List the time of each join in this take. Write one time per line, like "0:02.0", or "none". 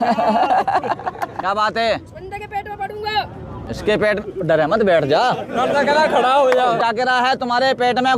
0:01.4
0:03.6
0:06.8